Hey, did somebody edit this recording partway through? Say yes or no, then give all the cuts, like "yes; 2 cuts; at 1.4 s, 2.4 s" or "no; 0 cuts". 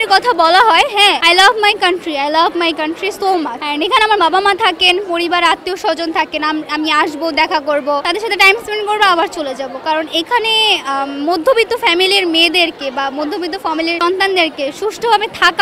yes; 4 cuts; at 1.2 s, 3.6 s, 8.0 s, 14.0 s